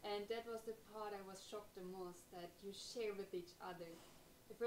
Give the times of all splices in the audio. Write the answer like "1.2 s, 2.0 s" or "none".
none